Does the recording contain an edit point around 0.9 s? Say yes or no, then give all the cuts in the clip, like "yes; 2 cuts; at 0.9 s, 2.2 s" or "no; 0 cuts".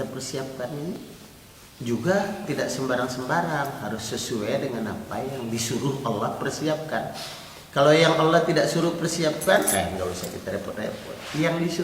yes; 1 cut; at 0.9 s